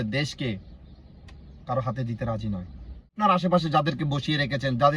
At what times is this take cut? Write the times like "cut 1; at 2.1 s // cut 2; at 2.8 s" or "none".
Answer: cut 1; at 3.1 s